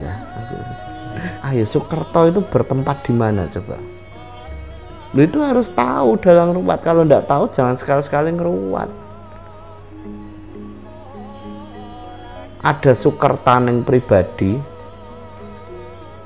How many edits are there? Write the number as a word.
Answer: one